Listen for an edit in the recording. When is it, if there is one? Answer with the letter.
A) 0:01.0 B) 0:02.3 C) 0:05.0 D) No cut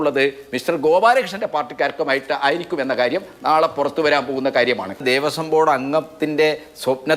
C